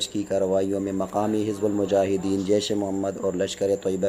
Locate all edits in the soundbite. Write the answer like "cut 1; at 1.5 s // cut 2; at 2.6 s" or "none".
none

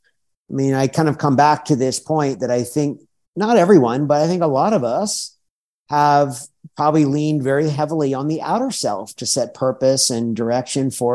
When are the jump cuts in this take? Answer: none

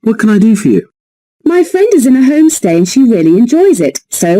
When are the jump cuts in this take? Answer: cut 1; at 2.9 s

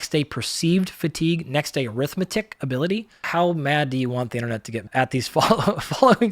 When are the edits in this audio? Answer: cut 1; at 3.3 s // cut 2; at 4.9 s

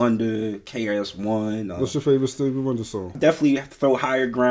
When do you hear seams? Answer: cut 1; at 3.1 s

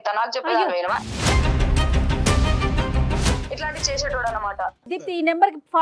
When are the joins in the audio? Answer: cut 1; at 4.9 s

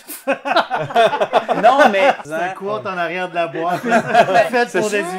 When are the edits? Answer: cut 1; at 2.2 s

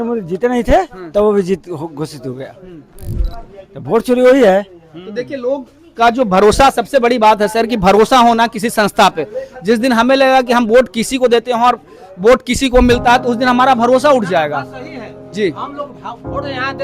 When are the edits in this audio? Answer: cut 1; at 3.3 s

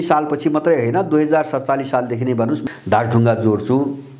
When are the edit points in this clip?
cut 1; at 2.6 s

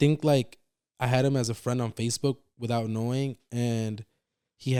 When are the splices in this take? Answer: none

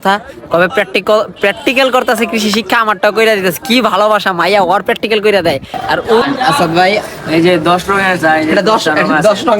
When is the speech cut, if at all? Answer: cut 1; at 1.9 s // cut 2; at 6.2 s

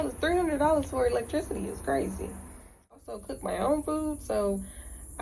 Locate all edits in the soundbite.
cut 1; at 3.0 s

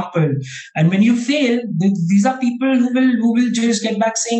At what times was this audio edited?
none

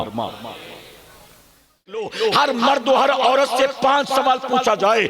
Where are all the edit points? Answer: cut 1; at 2.1 s

